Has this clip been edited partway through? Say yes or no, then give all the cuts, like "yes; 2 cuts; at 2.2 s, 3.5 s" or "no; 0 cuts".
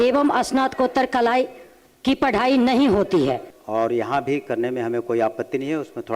yes; 1 cut; at 3.5 s